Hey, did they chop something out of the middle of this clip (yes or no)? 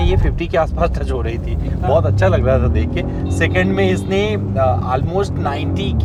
no